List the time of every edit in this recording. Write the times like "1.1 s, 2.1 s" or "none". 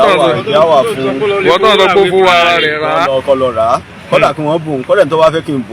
none